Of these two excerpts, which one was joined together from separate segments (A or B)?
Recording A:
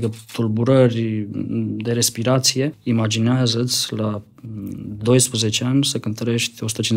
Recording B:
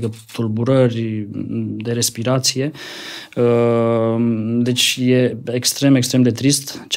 A